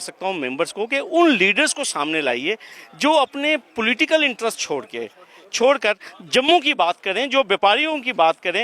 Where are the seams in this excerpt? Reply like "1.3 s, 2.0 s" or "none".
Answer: none